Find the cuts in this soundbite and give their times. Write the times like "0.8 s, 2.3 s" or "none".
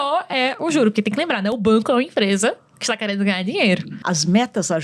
3.9 s